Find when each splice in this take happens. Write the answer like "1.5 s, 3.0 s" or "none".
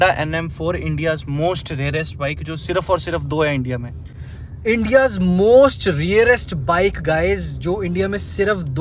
none